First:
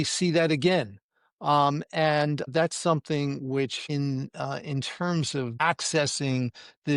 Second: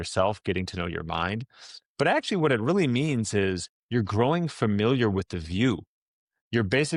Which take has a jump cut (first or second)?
first